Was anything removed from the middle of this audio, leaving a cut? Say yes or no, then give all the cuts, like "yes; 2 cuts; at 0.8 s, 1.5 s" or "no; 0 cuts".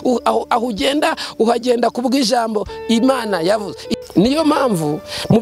yes; 1 cut; at 3.9 s